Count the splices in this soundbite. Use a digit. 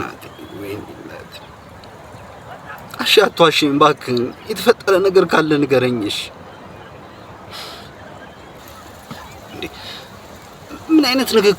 1